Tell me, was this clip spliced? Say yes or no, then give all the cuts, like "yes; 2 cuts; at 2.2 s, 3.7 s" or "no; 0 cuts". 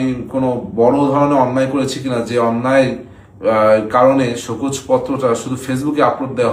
no; 0 cuts